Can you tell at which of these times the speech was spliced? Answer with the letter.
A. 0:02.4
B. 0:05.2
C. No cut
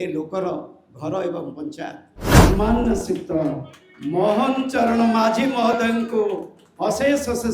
A